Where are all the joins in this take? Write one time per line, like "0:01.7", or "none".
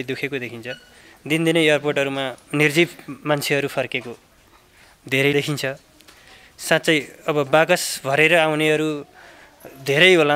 0:02.4
0:05.3

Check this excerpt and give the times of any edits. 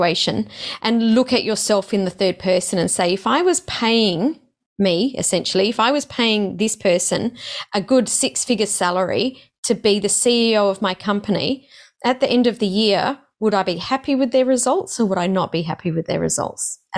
none

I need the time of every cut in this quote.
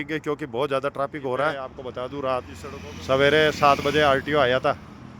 0:01.8

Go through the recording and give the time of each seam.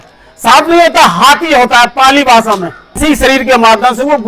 0:03.0

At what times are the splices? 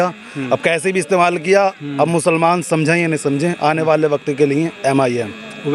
none

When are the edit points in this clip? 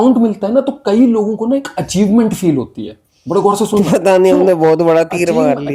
none

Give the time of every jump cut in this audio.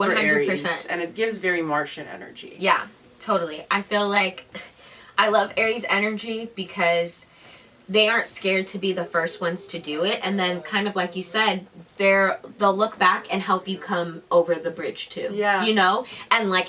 none

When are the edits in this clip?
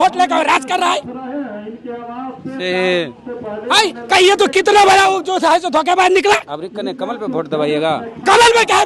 none

